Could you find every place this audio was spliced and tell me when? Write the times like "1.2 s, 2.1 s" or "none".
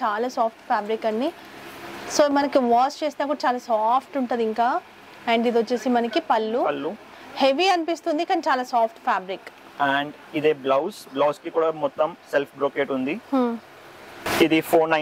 none